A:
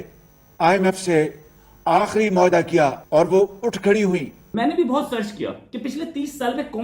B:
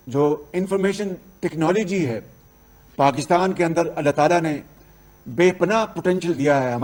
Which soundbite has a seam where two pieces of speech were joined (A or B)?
A